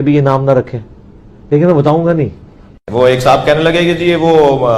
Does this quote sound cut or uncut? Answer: uncut